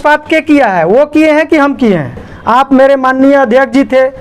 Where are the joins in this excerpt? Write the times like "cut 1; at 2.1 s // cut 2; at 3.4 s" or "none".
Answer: cut 1; at 2.3 s

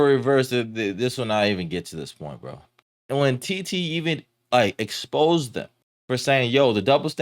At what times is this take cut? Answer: cut 1; at 2.8 s

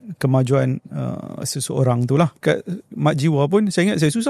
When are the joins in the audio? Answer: cut 1; at 2.4 s

